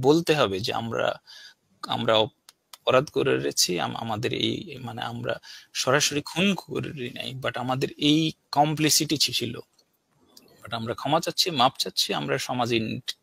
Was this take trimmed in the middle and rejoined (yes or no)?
no